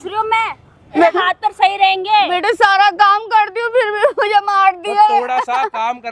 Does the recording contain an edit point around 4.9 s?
no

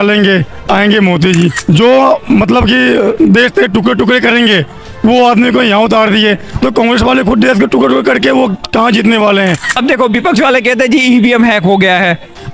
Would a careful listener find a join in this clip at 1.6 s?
yes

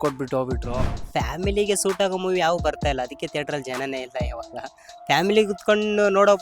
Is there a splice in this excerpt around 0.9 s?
yes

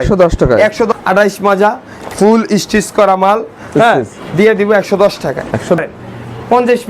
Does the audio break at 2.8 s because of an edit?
no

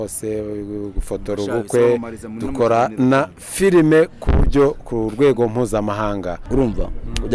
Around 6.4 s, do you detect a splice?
yes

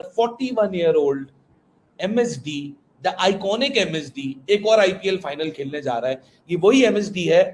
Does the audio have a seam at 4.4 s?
no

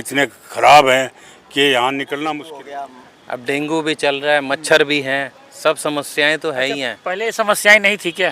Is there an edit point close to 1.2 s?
no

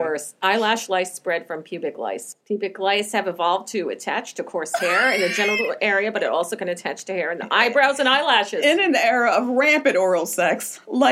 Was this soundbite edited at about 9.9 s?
no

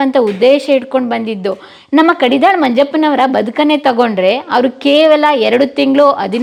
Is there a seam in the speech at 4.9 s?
no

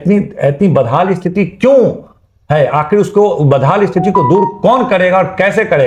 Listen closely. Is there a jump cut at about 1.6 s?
no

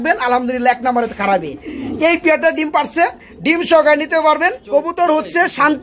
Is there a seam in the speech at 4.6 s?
yes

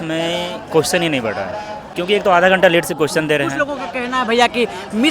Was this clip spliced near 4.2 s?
no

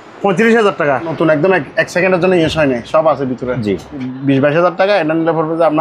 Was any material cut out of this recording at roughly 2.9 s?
no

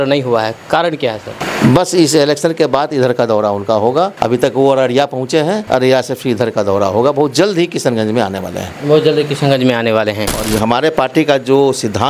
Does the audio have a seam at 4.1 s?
yes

